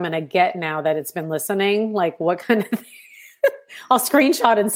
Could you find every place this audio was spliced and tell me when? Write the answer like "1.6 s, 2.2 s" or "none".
none